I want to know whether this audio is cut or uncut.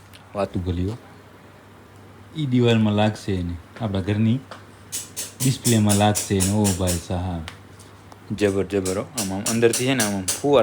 uncut